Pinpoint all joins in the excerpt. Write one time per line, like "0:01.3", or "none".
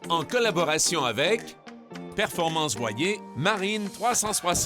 0:03.3